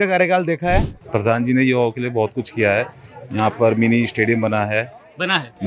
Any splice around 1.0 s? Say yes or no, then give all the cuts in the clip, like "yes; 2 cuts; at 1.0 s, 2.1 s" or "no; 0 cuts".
yes; 1 cut; at 1.0 s